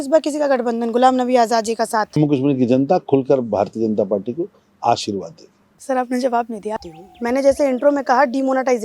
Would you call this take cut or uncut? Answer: cut